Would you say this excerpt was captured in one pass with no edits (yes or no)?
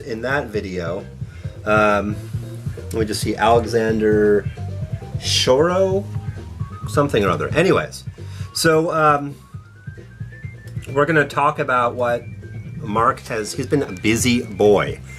yes